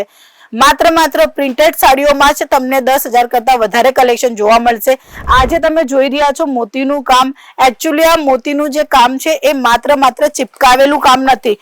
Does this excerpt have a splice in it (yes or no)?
no